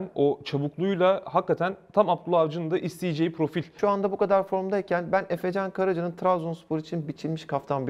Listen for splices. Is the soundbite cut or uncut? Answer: cut